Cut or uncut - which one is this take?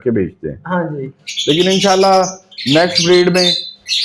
uncut